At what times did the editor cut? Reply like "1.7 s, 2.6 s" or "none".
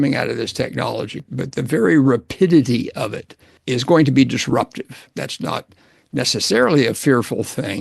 1.2 s, 3.5 s, 5.1 s